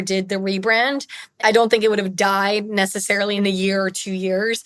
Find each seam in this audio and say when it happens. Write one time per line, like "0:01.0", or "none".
0:01.3
0:03.4